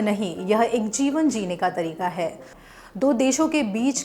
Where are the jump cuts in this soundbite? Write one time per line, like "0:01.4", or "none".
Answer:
0:02.7

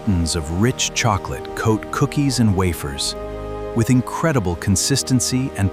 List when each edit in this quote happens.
none

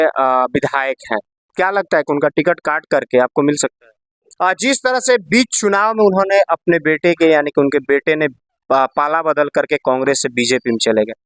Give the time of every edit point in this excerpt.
0:04.3

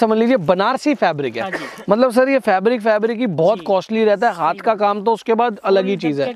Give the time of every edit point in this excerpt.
none

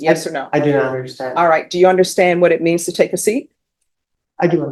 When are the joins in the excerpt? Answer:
none

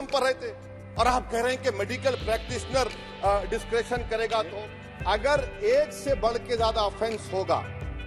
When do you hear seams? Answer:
0:04.6

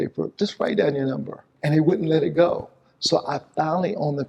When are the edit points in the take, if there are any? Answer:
0:01.5

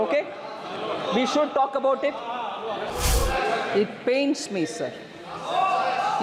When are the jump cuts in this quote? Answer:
0:02.9

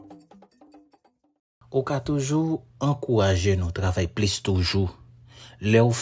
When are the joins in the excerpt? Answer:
0:01.5

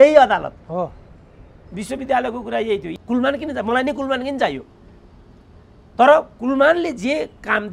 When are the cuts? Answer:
0:02.9

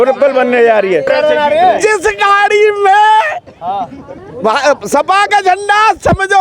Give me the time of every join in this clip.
0:01.1

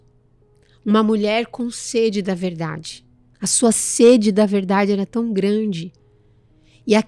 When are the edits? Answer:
0:03.2

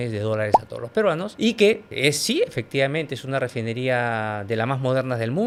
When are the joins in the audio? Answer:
none

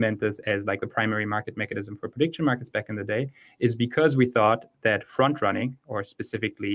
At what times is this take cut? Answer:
none

